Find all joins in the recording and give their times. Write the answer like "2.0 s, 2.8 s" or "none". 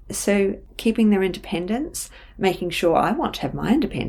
none